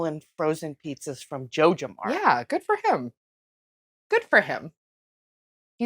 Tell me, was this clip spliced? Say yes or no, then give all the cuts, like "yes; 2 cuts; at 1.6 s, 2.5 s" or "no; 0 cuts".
no; 0 cuts